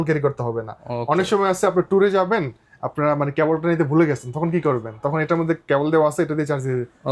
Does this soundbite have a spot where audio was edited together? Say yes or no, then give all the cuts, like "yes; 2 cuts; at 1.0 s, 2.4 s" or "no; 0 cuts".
no; 0 cuts